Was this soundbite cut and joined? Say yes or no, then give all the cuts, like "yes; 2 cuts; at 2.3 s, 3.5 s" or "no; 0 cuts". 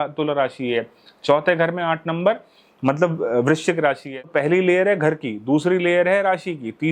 yes; 1 cut; at 4.1 s